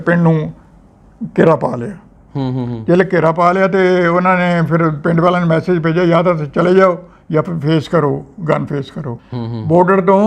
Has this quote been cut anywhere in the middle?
yes; 1 cut; at 9.1 s

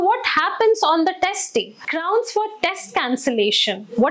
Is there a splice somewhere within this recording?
yes; 1 cut; at 1.8 s

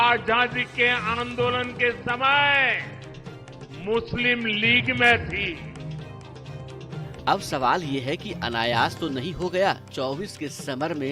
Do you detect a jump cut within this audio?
no; 0 cuts

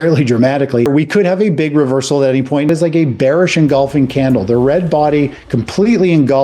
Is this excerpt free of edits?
no; 2 cuts; at 0.9 s, 2.7 s

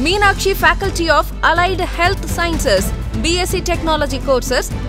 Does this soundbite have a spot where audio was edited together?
no; 0 cuts

